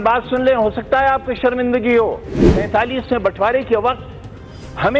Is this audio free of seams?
no; 1 cut; at 2.6 s

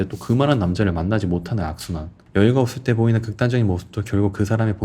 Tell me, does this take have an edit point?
yes; 1 cut; at 2.1 s

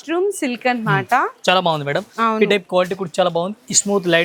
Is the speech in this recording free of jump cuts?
yes; 0 cuts

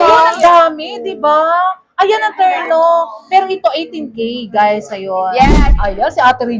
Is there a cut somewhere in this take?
yes; 1 cut; at 5.5 s

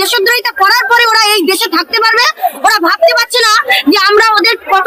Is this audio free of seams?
yes; 0 cuts

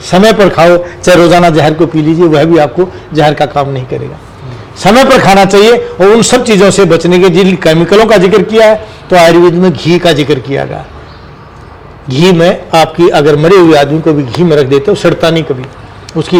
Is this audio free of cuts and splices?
yes; 0 cuts

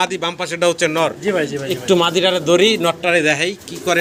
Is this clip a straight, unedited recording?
yes; 0 cuts

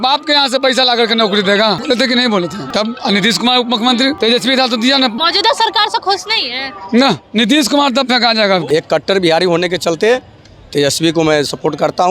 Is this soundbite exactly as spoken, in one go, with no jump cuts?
no; 5 cuts; at 1.8 s, 2.6 s, 4.2 s, 5.2 s, 8.7 s

